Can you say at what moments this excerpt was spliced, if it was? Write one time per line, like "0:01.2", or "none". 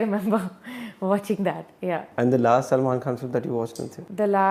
none